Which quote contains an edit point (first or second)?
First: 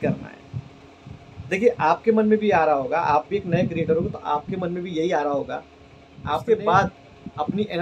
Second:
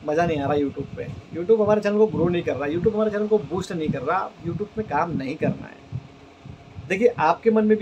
first